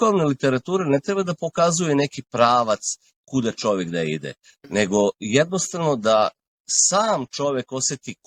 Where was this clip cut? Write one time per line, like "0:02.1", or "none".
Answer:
none